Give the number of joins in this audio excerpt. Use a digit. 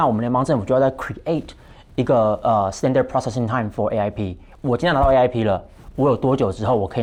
0